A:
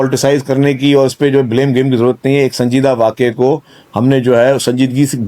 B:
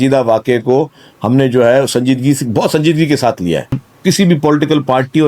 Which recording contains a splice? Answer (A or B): B